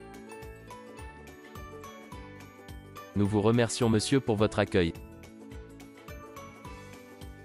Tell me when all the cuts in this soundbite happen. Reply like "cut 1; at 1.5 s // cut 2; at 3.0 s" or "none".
cut 1; at 2.8 s // cut 2; at 5.3 s